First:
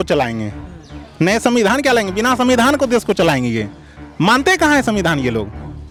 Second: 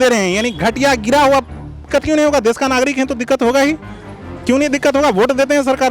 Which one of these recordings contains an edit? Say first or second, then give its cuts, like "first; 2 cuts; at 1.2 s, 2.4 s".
second; 1 cut; at 1.8 s